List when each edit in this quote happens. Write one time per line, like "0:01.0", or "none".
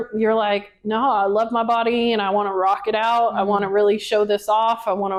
none